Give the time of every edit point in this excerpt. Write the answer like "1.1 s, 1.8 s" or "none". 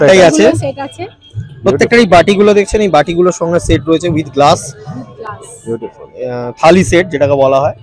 none